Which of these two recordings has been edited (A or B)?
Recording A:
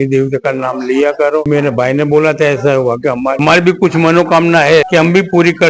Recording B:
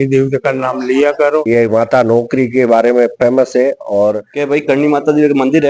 B